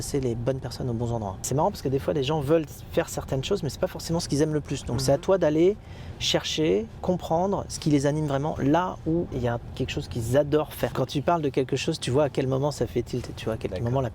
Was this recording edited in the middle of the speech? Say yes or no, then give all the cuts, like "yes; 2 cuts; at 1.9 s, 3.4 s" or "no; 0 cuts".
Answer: yes; 3 cuts; at 1.4 s, 9.3 s, 10.9 s